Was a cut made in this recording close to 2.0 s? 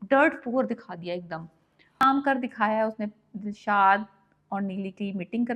yes; 1 cut; at 2.0 s

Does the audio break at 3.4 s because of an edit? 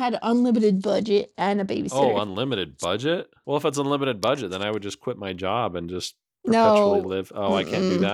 yes; 1 cut; at 3.4 s

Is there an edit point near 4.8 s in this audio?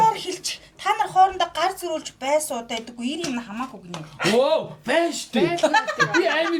no; 0 cuts

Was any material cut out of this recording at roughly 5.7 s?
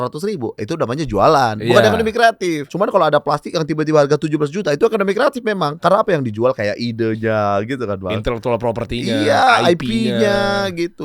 yes; 2 cuts; at 2.7 s, 5.7 s

